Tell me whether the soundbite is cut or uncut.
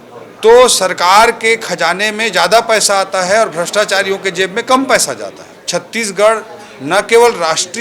cut